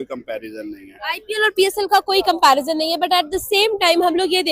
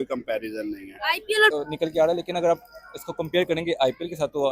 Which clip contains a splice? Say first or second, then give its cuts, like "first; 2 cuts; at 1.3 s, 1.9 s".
second; 1 cut; at 1.5 s